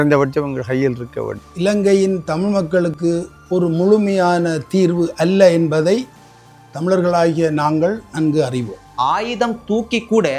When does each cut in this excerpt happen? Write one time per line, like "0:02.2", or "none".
0:01.4
0:08.8